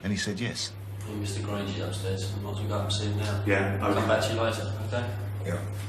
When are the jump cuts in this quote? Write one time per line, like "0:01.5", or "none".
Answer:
none